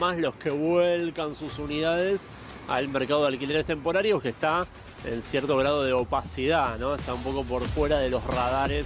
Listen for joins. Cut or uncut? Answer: uncut